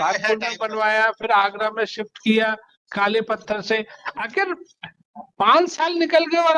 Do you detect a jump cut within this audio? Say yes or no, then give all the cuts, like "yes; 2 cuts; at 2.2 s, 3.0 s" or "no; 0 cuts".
no; 0 cuts